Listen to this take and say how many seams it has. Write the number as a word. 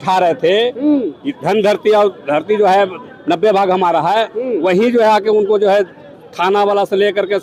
zero